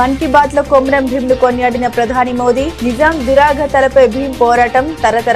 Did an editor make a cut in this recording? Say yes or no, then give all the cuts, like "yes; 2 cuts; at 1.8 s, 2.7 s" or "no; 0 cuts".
no; 0 cuts